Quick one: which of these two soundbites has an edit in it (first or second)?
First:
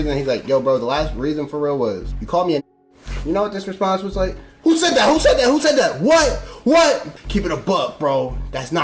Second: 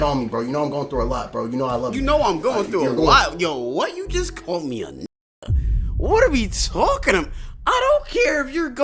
first